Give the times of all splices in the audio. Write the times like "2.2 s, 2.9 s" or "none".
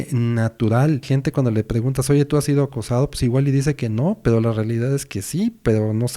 1.0 s